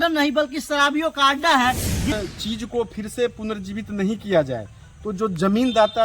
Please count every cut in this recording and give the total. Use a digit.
1